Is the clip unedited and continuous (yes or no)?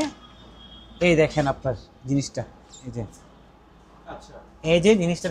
yes